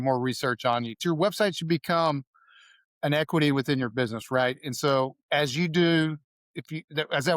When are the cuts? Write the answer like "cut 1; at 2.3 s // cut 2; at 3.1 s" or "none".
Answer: cut 1; at 1.0 s